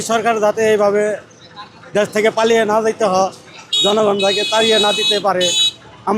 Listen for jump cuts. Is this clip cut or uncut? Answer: uncut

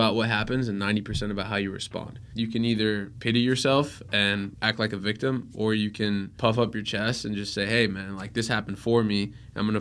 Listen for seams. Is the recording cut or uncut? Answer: cut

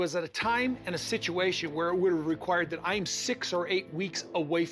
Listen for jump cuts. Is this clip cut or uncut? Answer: uncut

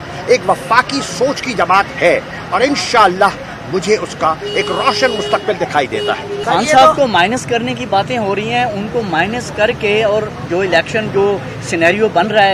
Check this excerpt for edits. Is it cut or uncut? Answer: cut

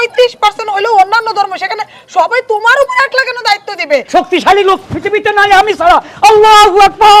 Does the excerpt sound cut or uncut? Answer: cut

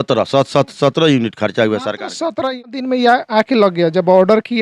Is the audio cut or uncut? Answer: cut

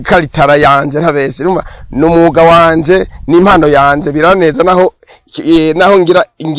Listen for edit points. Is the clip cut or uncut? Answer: uncut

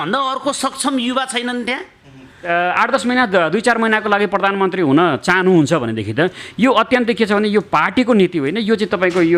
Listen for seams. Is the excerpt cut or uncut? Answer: cut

